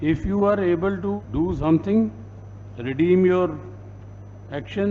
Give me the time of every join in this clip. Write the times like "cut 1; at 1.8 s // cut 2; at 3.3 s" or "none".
cut 1; at 1.2 s